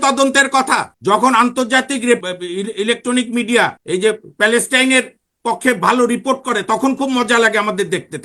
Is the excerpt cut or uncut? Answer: cut